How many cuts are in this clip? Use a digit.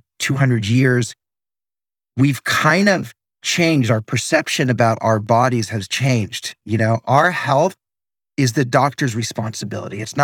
0